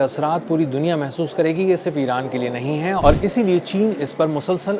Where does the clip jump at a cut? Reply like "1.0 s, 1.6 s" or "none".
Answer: none